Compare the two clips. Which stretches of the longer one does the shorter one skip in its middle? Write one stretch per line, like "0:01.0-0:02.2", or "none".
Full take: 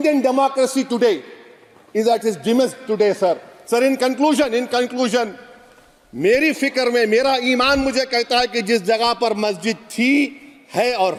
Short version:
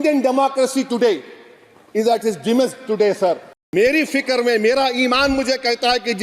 0:03.5-0:06.0